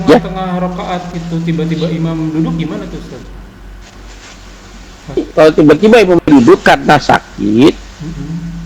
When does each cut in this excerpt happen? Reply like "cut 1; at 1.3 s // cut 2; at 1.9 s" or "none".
cut 1; at 5.2 s